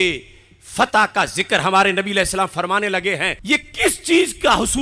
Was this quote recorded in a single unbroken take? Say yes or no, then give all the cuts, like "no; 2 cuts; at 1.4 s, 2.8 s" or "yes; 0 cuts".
no; 1 cut; at 3.4 s